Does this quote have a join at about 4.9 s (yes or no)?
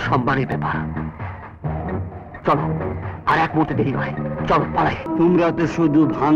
yes